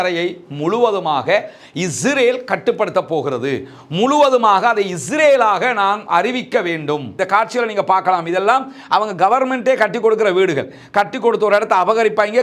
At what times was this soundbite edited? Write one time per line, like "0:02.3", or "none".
0:07.1